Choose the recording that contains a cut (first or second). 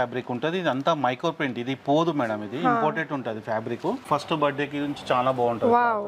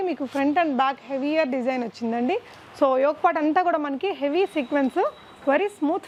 first